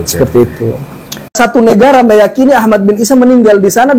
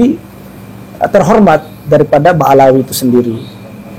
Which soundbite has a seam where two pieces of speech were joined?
first; 1 cut; at 1.3 s

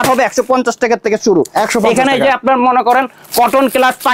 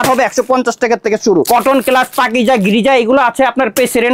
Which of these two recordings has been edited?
second; 1 cut; at 1.5 s

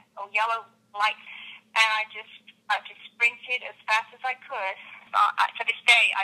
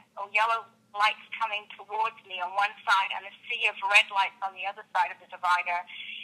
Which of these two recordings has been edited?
first; 2 cuts; at 1.2 s, 5.1 s

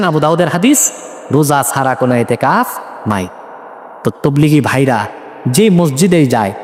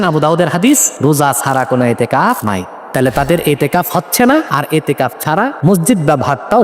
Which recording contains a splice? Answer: second; 4 cuts; at 0.9 s, 2.6 s, 4.5 s, 5.6 s

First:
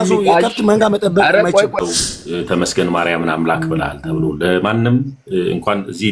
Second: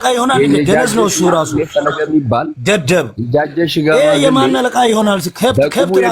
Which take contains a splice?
first; 1 cut; at 1.8 s

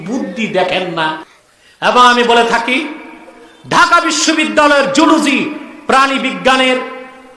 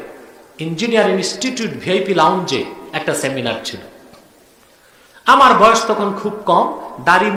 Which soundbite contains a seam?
first; 1 cut; at 1.3 s

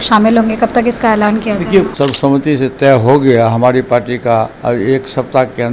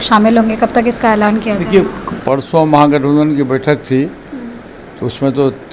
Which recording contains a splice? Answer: first; 2 cuts; at 1.9 s, 4.6 s

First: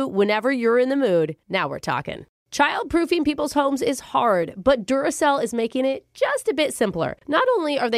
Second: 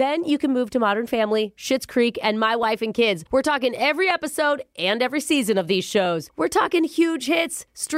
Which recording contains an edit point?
first; 1 cut; at 2.2 s

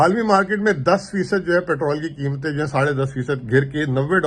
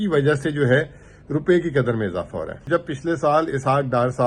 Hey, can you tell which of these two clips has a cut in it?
second; 1 cut; at 2.7 s

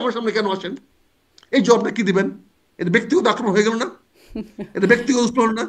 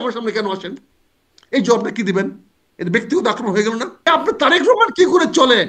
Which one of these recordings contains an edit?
second; 1 cut; at 4.1 s

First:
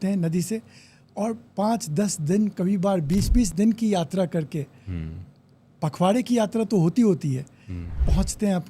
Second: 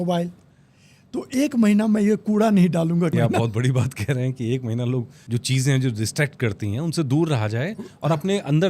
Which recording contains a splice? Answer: second; 2 cuts; at 3.1 s, 5.2 s

